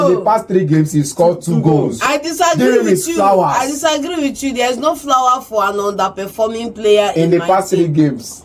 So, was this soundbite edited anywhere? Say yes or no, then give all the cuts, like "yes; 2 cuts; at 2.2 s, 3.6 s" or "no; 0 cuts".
no; 0 cuts